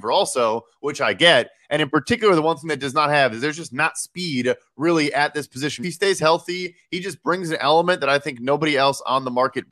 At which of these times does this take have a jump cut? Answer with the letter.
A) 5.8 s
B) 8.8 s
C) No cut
A